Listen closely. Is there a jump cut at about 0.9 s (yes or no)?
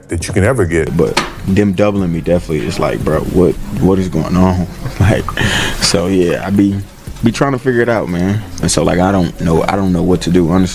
yes